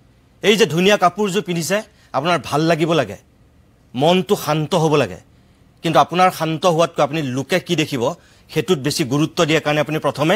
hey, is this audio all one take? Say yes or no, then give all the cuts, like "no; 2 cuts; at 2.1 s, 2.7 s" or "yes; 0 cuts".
yes; 0 cuts